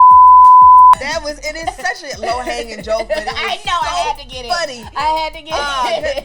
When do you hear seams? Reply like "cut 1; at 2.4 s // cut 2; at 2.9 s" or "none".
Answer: cut 1; at 1.0 s